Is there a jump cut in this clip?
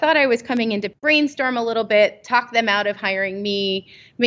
yes; 1 cut; at 0.9 s

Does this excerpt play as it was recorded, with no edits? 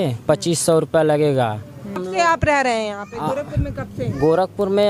no; 1 cut; at 2.0 s

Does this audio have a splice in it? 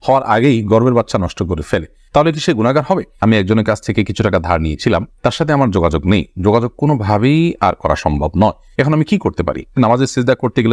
yes; 2 cuts; at 3.2 s, 9.7 s

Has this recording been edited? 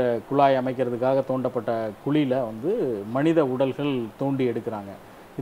no; 0 cuts

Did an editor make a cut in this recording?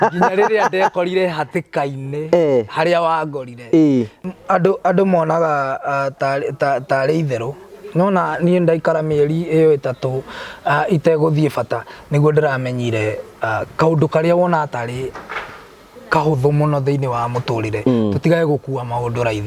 yes; 1 cut; at 4.2 s

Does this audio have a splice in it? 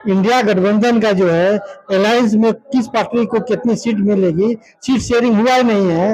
no; 0 cuts

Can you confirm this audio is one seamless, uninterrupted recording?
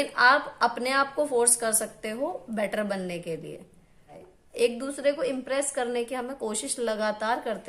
no; 1 cut; at 4.2 s

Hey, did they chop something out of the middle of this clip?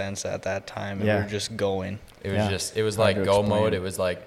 no; 0 cuts

